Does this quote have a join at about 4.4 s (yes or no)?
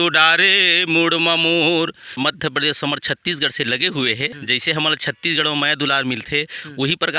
yes